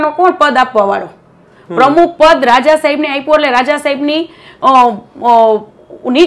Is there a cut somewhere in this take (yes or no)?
no